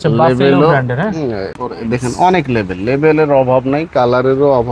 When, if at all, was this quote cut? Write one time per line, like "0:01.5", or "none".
0:01.6